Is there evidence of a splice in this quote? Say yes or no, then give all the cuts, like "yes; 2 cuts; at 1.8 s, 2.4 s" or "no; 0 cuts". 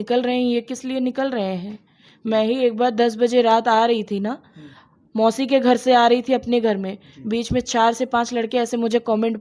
no; 0 cuts